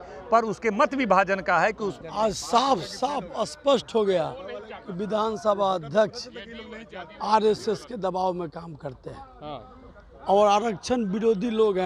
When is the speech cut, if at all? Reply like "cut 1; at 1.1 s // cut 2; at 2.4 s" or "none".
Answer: cut 1; at 2.0 s